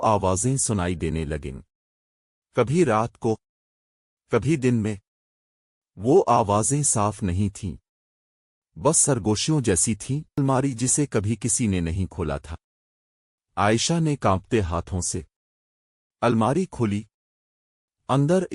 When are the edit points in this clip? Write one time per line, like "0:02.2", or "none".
0:10.4